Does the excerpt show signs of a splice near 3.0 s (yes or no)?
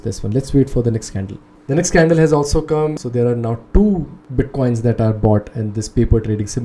yes